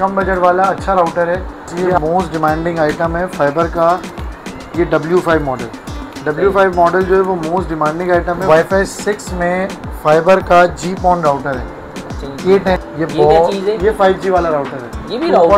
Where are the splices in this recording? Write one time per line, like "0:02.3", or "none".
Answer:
0:02.0
0:08.4
0:12.8